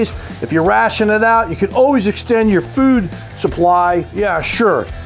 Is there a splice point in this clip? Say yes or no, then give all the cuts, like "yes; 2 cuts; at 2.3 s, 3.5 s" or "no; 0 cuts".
yes; 1 cut; at 4.1 s